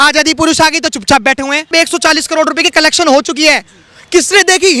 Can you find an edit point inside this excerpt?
yes; 1 cut; at 1.7 s

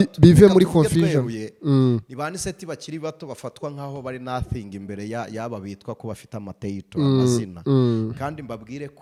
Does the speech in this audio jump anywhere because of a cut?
no; 0 cuts

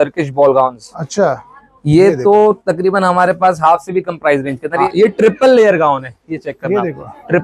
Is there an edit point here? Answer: yes; 1 cut; at 4.8 s

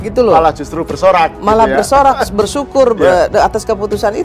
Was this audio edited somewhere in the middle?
no; 0 cuts

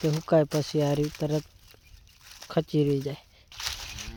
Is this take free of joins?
yes; 0 cuts

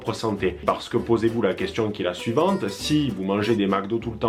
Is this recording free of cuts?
yes; 0 cuts

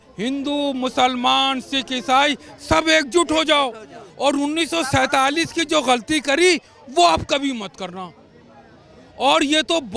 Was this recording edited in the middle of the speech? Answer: no; 0 cuts

